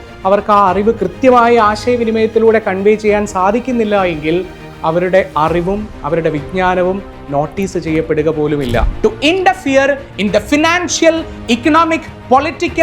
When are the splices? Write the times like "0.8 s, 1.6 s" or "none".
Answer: 8.9 s